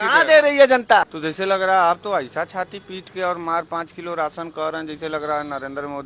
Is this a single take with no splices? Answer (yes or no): no